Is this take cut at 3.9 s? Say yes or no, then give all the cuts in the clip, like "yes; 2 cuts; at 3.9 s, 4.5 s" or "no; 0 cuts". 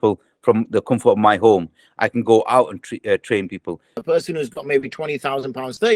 yes; 1 cut; at 3.9 s